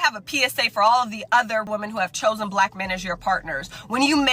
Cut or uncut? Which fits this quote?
cut